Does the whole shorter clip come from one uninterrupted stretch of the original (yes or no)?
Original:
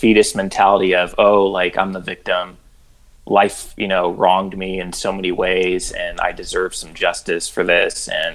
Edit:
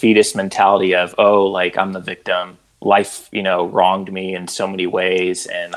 no